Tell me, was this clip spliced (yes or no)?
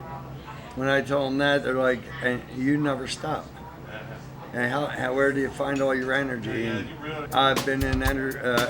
yes